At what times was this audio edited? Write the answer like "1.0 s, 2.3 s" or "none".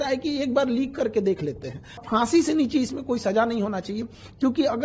2.0 s